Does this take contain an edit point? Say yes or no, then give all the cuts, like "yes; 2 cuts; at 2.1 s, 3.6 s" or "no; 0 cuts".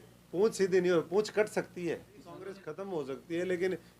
yes; 1 cut; at 2.7 s